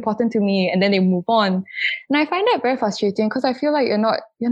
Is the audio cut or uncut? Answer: uncut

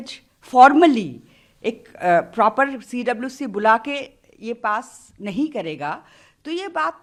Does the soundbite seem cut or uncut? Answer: uncut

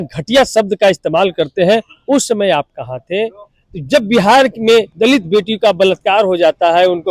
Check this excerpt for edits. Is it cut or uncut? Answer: cut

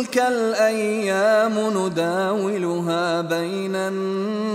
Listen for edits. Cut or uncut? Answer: uncut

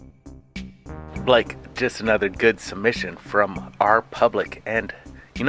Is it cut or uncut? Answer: cut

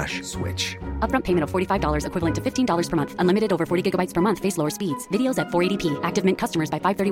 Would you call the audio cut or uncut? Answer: uncut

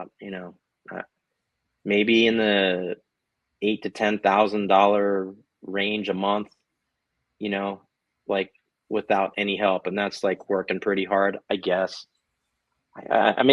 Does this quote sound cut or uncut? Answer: uncut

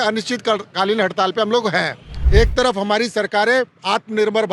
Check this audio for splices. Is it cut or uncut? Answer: cut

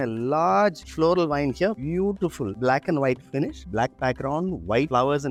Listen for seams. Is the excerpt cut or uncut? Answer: uncut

